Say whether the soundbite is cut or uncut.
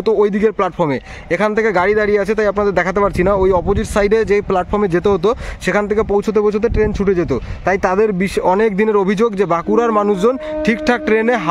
uncut